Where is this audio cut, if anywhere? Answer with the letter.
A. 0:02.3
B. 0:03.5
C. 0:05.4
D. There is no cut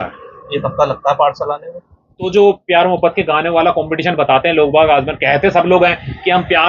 A